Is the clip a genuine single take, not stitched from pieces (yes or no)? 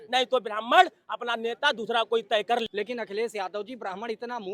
no